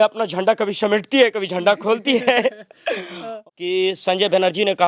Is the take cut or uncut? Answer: cut